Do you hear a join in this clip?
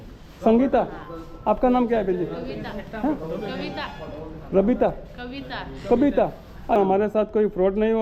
yes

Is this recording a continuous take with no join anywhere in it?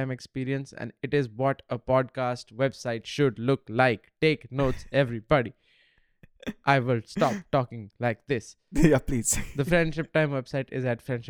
no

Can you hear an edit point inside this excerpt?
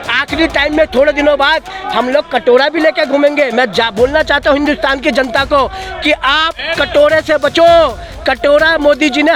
no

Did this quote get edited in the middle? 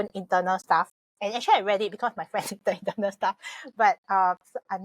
yes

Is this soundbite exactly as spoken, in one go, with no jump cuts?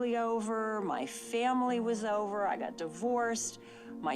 yes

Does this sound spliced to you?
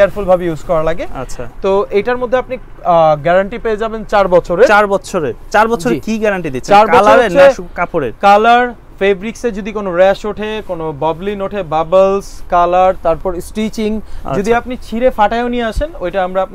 no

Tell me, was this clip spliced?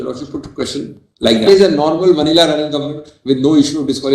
yes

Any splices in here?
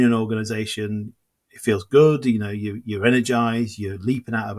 yes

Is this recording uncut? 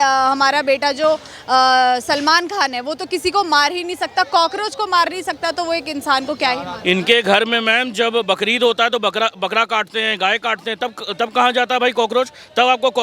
yes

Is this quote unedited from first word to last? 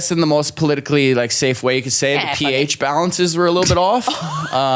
yes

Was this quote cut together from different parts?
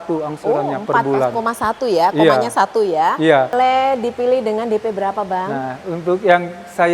yes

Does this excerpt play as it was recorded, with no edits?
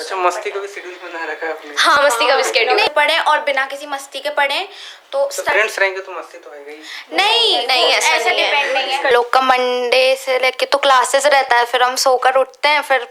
no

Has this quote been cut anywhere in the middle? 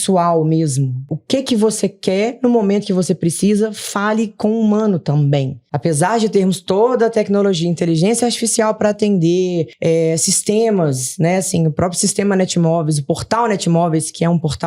yes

